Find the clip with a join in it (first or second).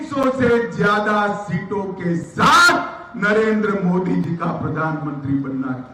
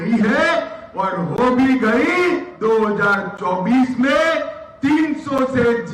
second